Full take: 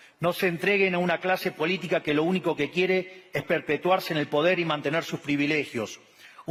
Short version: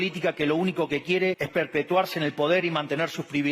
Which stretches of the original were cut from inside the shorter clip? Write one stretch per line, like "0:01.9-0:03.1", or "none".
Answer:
0:03.1-0:03.4